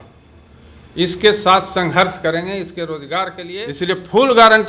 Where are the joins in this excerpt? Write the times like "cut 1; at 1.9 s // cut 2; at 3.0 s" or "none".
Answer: cut 1; at 3.4 s